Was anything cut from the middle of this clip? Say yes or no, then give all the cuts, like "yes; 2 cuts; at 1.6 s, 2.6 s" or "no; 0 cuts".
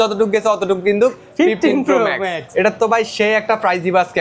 yes; 1 cut; at 2.4 s